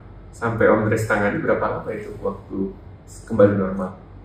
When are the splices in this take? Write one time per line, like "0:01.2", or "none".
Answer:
none